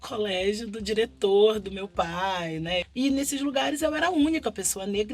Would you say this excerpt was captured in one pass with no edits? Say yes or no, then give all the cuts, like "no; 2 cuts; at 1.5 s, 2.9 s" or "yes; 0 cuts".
no; 1 cut; at 2.8 s